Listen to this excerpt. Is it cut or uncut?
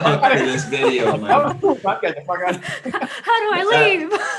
uncut